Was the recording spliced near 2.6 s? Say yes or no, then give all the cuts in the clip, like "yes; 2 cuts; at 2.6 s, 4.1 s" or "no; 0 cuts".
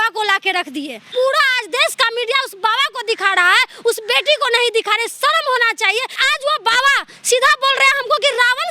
no; 2 cuts; at 1.0 s, 6.2 s